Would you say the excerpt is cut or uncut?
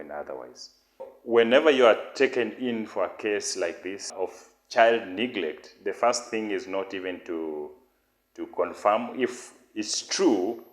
cut